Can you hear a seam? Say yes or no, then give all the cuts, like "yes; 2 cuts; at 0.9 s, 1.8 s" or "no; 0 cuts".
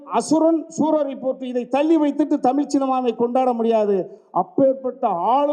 no; 0 cuts